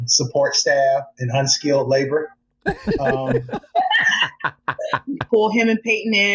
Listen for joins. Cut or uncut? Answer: cut